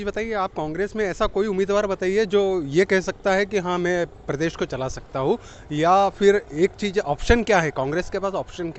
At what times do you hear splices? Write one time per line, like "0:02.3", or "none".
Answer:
none